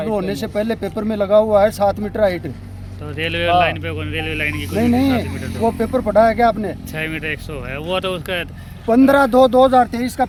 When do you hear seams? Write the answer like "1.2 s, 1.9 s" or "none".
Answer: none